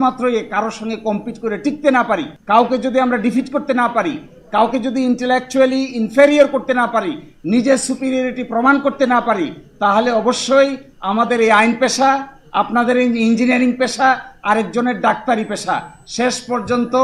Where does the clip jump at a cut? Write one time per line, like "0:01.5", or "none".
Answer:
0:02.3